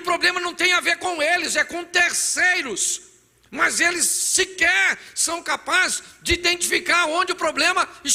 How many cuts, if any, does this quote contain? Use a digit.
0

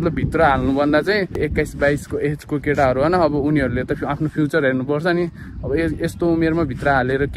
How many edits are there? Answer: 1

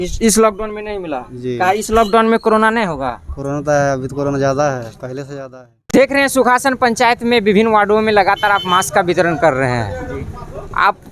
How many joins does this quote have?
1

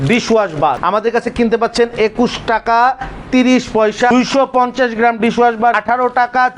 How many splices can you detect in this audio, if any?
3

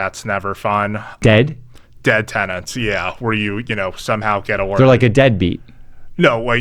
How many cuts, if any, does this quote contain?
1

